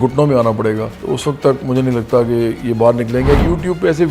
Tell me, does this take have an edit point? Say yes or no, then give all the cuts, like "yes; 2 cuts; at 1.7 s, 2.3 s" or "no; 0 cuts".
yes; 2 cuts; at 0.9 s, 3.4 s